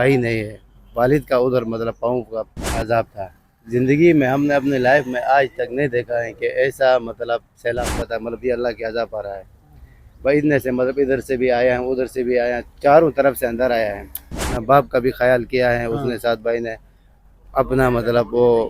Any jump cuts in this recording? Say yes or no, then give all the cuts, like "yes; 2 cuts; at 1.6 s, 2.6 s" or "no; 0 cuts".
yes; 3 cuts; at 2.8 s, 7.9 s, 14.6 s